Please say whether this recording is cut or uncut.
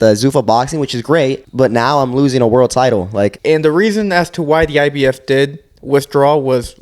cut